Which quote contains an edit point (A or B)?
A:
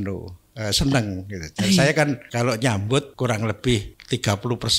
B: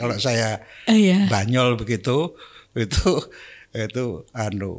A